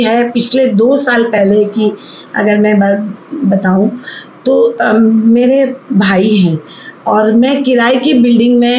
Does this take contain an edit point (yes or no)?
no